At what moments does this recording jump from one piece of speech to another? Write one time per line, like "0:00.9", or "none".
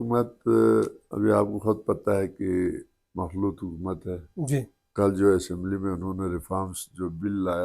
0:01.0
0:04.8